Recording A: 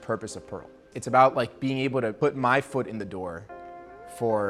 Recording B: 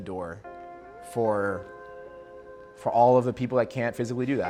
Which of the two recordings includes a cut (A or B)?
A